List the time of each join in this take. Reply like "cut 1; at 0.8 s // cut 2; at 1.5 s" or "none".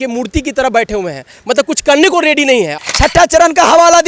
cut 1; at 2.8 s